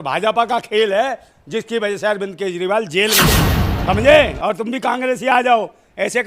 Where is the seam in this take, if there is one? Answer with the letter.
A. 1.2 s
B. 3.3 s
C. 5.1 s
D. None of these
B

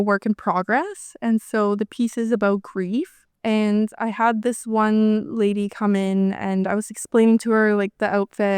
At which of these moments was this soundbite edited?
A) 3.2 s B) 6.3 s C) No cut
A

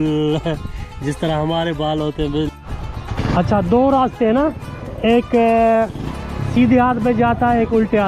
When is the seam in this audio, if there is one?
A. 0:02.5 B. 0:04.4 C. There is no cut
A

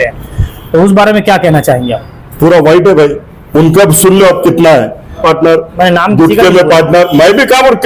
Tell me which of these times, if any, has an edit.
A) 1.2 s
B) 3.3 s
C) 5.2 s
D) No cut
C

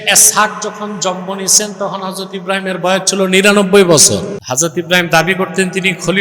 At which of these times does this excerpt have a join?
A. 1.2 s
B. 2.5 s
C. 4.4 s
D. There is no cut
C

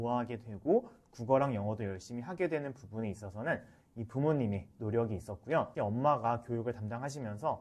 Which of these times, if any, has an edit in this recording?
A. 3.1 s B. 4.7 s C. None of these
C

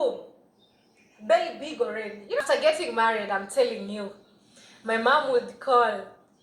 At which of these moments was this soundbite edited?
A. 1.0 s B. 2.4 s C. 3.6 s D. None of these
B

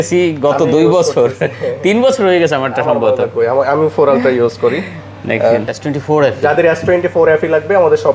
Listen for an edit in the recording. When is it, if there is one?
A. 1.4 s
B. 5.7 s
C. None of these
B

